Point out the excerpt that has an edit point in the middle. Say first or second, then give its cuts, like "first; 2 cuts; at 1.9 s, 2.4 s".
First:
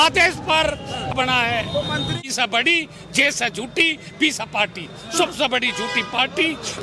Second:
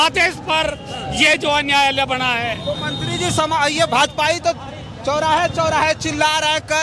first; 2 cuts; at 1.1 s, 2.3 s